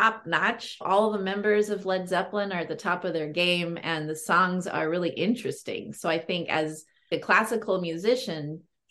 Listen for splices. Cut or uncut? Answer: cut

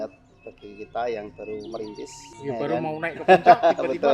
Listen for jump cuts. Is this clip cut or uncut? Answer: cut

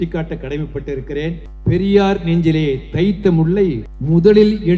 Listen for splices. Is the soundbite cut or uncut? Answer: cut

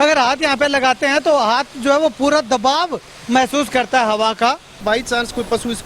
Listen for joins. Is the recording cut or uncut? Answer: cut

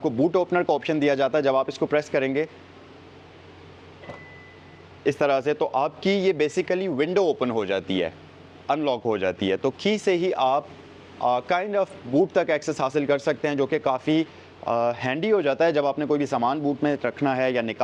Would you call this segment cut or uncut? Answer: uncut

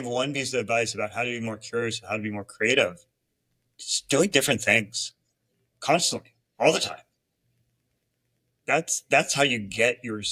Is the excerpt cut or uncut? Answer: uncut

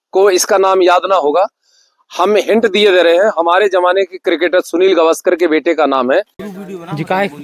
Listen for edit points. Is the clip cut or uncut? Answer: cut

